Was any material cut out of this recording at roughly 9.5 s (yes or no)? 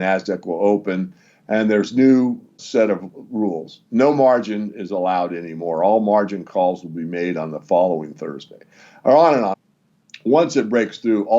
yes